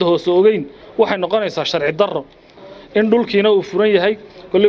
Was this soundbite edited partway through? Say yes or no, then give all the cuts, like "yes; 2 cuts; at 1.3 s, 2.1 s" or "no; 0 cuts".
yes; 1 cut; at 2.6 s